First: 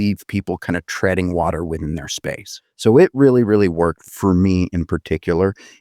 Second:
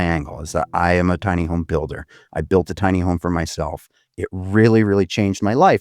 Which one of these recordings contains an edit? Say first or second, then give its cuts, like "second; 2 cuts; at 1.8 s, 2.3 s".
first; 2 cuts; at 2.5 s, 4.1 s